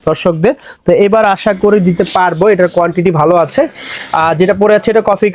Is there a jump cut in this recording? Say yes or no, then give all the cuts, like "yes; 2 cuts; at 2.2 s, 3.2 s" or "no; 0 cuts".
no; 0 cuts